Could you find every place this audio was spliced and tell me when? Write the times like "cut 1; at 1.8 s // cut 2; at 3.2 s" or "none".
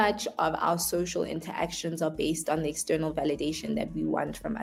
none